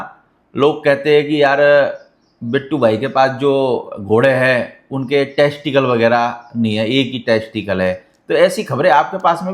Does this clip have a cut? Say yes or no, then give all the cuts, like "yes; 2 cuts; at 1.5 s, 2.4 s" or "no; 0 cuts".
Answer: no; 0 cuts